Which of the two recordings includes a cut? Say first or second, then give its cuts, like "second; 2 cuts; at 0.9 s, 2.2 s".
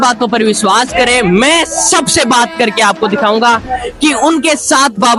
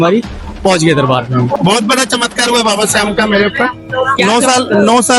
second; 1 cut; at 1.6 s